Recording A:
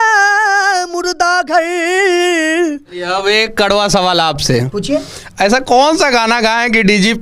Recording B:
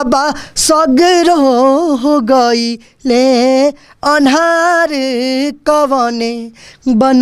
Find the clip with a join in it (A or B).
A